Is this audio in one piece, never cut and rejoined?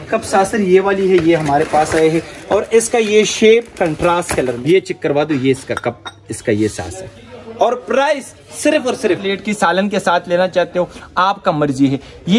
no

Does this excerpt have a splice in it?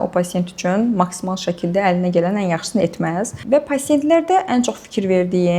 no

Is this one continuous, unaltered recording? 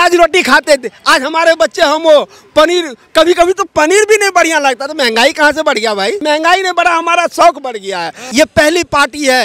no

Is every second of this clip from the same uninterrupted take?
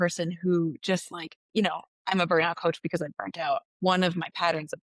no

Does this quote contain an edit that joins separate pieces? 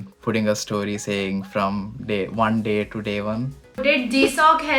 yes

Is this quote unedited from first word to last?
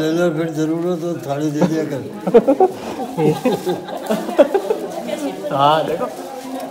yes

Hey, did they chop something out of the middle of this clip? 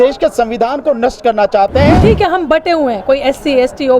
yes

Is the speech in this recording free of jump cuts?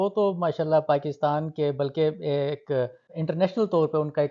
no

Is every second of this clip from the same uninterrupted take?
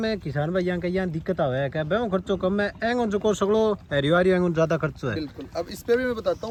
yes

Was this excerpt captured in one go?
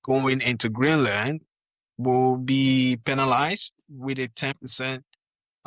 yes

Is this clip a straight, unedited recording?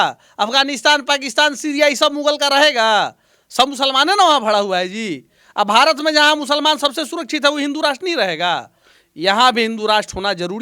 yes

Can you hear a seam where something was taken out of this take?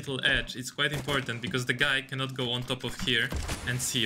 no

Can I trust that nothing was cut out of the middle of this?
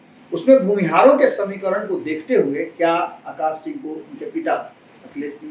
yes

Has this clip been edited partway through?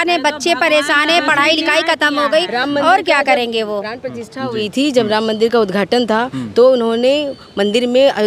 no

